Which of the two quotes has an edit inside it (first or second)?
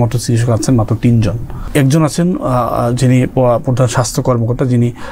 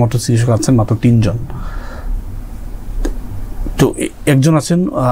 first